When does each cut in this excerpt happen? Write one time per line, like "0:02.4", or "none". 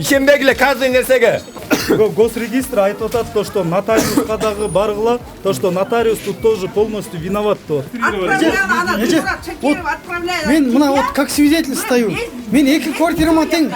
0:01.5
0:07.9

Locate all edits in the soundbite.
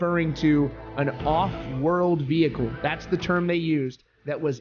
none

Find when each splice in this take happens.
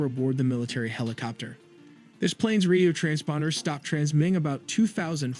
0:04.5

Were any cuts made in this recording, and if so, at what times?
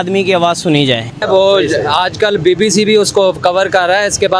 0:01.2

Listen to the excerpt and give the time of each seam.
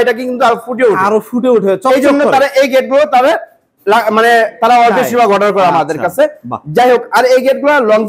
none

